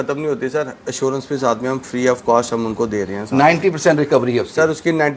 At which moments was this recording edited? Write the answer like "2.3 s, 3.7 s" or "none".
none

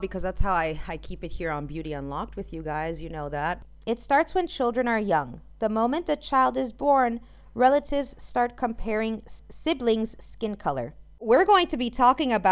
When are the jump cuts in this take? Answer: 3.7 s, 9.3 s, 11.2 s

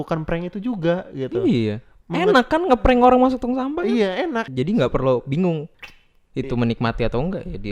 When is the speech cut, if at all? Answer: 1.9 s, 4.5 s, 5.7 s

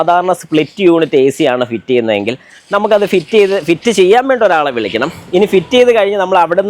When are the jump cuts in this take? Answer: none

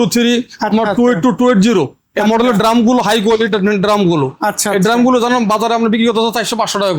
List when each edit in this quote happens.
none

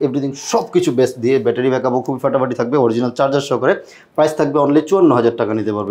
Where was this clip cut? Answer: none

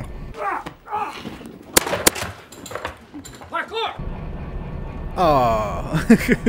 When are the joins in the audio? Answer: none

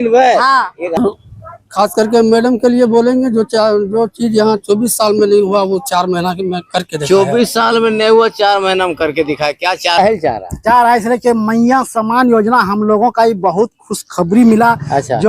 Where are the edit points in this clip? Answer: 1.0 s, 10.0 s

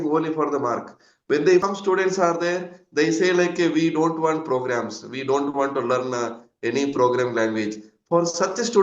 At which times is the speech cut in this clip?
1.6 s

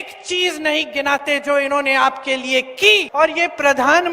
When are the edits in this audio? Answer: 3.1 s

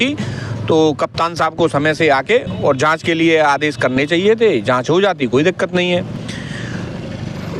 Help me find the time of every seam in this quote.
none

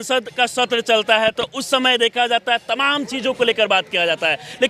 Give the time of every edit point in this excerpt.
none

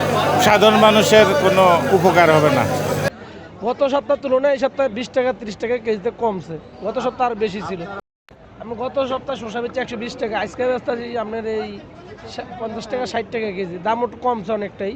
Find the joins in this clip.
3.1 s, 8.0 s

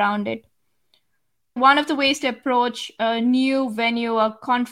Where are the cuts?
1.6 s

